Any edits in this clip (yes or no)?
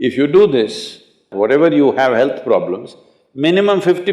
yes